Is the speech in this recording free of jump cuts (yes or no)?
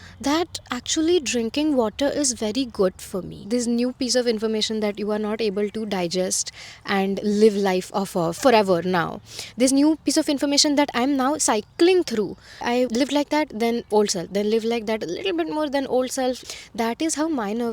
no